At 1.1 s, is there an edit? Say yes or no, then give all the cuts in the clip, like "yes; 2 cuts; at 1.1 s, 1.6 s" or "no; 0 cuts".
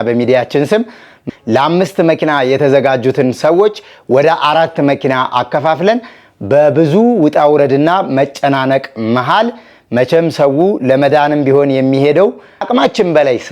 yes; 2 cuts; at 1.1 s, 12.6 s